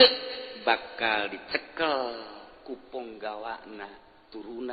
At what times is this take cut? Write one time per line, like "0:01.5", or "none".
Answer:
none

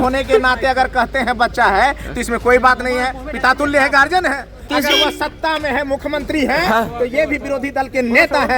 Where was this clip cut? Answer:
0:04.7

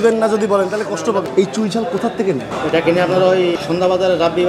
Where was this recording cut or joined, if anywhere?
0:01.3
0:02.5
0:03.6

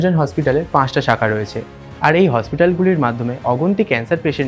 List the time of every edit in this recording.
none

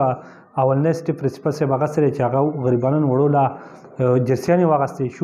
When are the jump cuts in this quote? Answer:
none

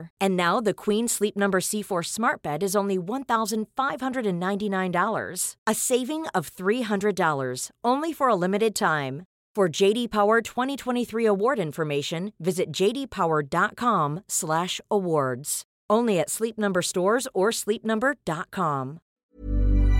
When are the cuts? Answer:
0:19.1

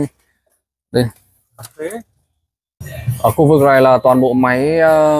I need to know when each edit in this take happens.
0:02.9

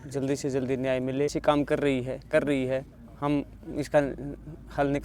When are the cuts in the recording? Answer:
0:01.4

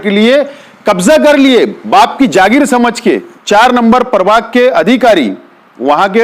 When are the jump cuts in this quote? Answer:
0:03.3

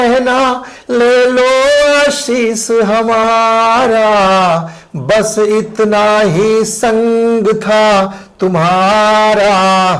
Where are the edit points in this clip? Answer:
none

